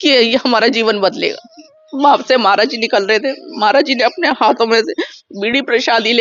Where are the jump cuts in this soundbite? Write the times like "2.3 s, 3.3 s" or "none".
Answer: 1.8 s